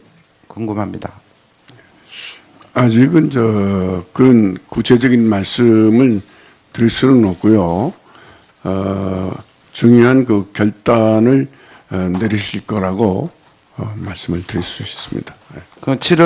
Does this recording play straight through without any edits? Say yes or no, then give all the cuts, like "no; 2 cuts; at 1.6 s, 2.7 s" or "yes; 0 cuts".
yes; 0 cuts